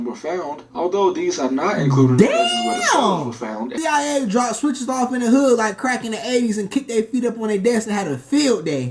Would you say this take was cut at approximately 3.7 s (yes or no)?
yes